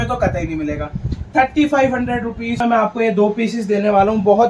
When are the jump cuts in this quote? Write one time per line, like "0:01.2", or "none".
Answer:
0:02.6